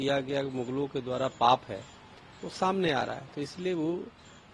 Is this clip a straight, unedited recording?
no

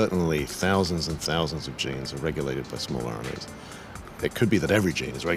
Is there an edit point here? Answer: no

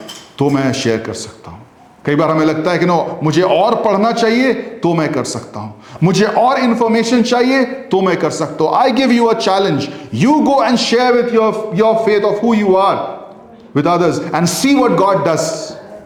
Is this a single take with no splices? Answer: yes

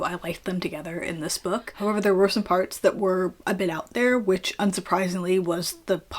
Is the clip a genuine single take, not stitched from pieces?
no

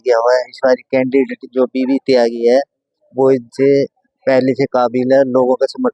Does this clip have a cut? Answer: no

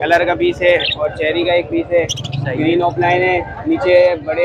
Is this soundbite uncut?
yes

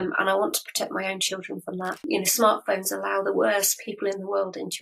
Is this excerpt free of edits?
no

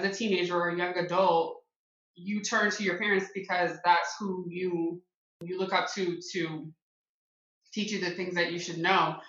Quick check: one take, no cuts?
no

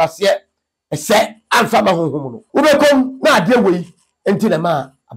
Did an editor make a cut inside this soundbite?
yes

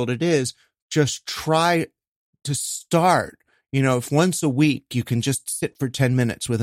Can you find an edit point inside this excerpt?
no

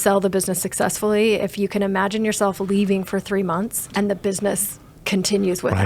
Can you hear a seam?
yes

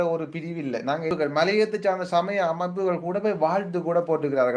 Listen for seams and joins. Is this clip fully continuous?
no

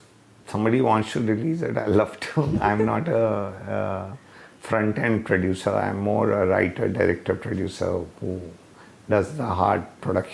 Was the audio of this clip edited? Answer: no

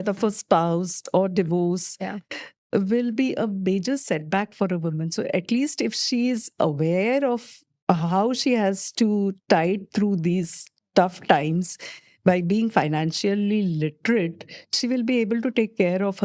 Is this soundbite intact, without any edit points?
yes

